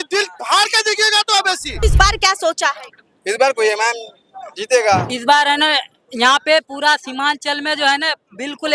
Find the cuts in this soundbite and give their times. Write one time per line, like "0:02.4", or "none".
0:01.8
0:05.1